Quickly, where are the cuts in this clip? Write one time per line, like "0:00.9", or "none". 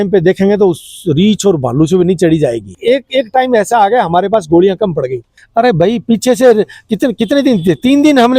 0:02.7
0:05.4